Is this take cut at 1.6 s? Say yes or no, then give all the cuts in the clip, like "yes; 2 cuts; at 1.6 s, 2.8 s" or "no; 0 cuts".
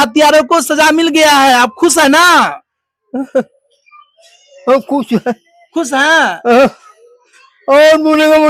no; 0 cuts